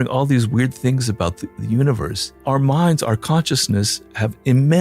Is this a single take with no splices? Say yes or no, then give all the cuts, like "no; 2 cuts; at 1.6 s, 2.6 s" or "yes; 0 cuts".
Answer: no; 1 cut; at 2.3 s